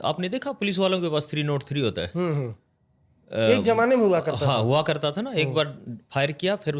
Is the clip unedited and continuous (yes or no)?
yes